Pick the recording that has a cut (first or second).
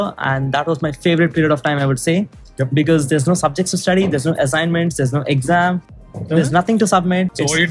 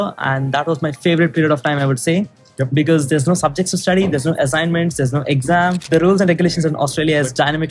second